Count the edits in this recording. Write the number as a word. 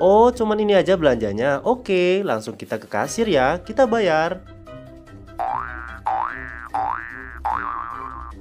zero